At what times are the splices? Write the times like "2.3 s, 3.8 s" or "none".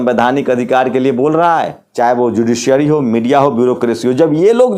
1.8 s